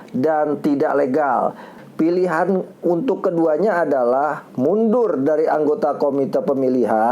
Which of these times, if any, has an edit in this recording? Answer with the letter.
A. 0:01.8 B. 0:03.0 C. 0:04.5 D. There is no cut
A